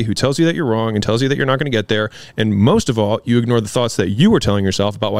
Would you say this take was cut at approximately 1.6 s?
no; 0 cuts

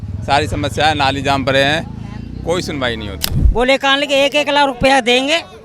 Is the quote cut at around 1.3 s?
no; 1 cut; at 3.3 s

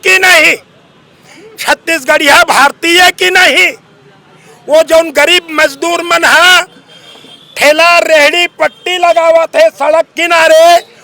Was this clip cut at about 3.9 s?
no; 0 cuts

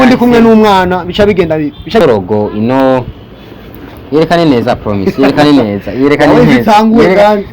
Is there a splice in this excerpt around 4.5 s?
no; 1 cut; at 2.0 s

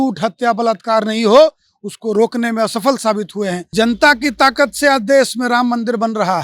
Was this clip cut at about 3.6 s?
yes; 1 cut; at 3.6 s

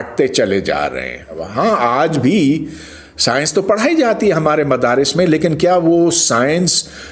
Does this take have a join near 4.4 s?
no; 1 cut; at 1.4 s

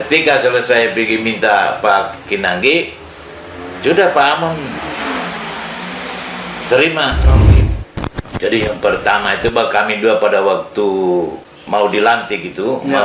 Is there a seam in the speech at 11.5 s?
yes; 2 cuts; at 7.5 s, 11.5 s

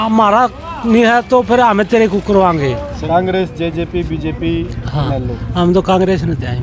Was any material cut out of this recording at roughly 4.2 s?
no; 1 cut; at 2.9 s

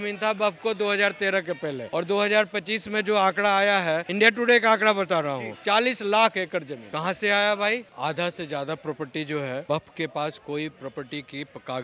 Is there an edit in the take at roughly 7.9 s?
yes; 5 cuts; at 1.8 s, 4.1 s, 6.8 s, 7.9 s, 9.6 s

